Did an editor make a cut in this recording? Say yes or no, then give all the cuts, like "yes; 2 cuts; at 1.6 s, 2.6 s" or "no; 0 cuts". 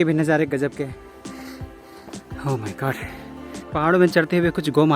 yes; 1 cut; at 1.0 s